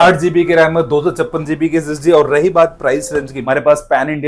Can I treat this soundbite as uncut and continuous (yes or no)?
no